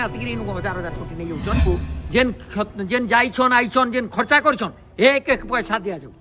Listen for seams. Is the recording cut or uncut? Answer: cut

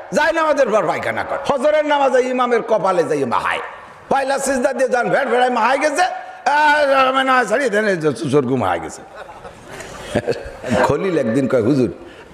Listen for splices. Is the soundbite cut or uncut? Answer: cut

